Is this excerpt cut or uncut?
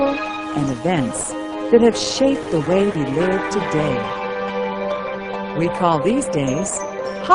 uncut